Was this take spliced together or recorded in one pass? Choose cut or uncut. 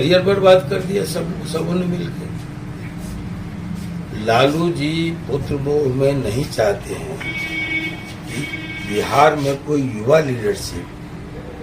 uncut